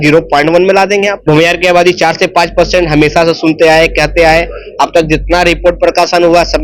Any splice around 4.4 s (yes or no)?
no